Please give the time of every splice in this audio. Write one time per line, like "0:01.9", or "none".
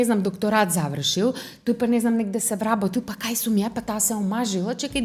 none